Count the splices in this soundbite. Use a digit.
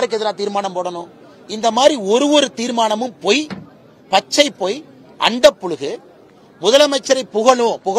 0